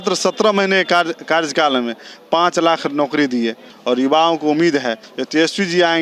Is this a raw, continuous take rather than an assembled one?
no; 2 cuts; at 3.7 s, 5.1 s

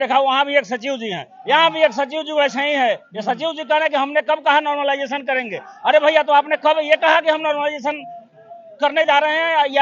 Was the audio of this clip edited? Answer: no; 0 cuts

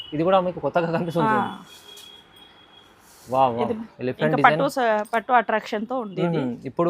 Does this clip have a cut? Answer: yes; 1 cut; at 3.9 s

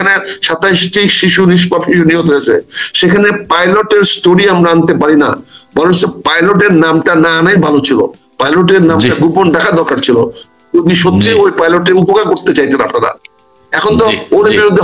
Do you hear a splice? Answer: no; 0 cuts

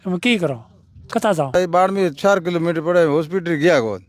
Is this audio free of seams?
no; 1 cut; at 1.5 s

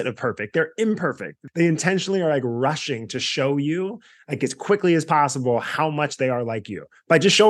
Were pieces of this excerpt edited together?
yes; 1 cut; at 1.3 s

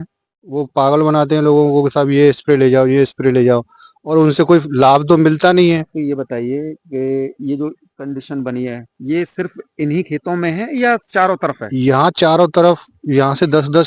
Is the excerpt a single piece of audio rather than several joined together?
yes; 0 cuts

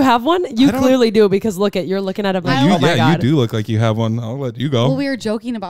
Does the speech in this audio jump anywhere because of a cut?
no; 0 cuts

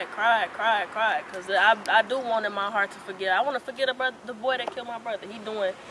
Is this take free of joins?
yes; 0 cuts

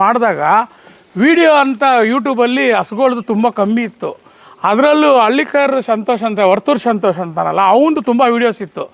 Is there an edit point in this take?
no; 0 cuts

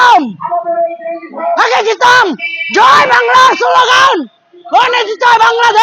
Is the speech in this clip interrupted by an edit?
no; 0 cuts

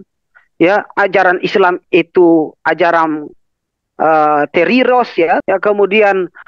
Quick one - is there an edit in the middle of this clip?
yes; 1 cut; at 5.4 s

